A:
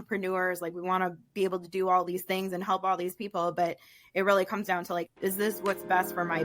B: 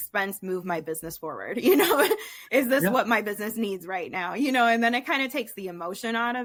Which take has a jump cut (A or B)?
A